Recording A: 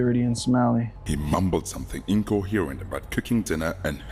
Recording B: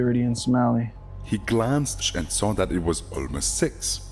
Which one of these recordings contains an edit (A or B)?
A